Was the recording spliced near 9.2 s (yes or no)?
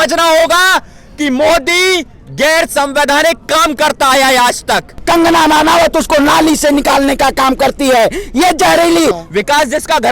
yes